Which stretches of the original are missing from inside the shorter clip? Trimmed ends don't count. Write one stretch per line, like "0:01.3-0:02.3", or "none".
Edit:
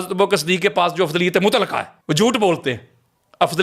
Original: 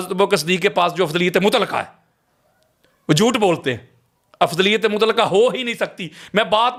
0:01.9-0:02.9